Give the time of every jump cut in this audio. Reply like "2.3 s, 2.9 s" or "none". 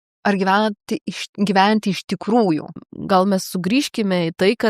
2.7 s

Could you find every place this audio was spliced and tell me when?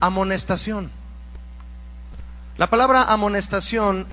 2.7 s

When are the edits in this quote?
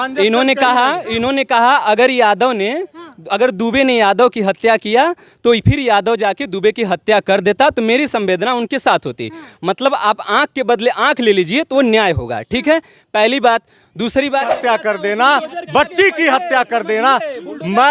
14.5 s

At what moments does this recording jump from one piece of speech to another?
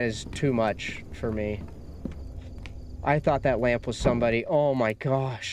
none

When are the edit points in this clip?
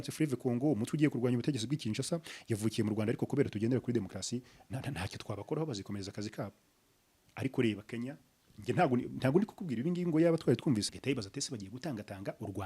10.9 s

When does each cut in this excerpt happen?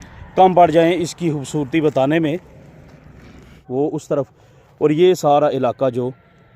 3.6 s

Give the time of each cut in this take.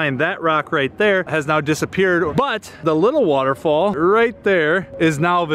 2.3 s, 4.0 s

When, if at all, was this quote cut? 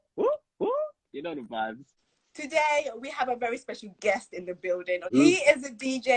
1.8 s, 5.1 s

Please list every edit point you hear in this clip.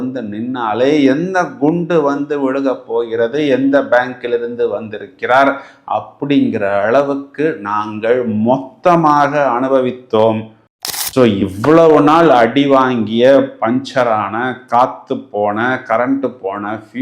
10.6 s

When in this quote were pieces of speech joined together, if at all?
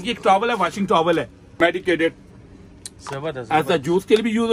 1.4 s

